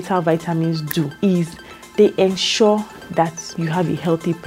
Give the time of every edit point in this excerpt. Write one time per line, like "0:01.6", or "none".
0:01.1
0:03.5